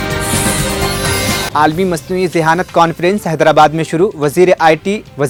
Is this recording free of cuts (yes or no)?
yes